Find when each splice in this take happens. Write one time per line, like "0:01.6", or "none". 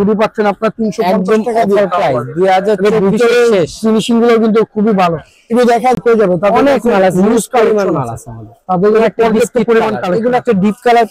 0:06.0